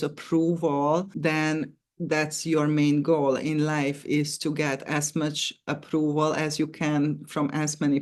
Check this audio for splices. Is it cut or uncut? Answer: cut